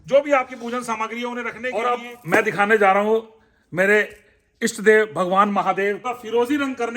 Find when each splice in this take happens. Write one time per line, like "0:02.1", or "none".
0:01.7
0:06.0